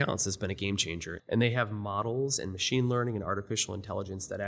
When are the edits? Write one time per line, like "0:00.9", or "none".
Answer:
0:01.1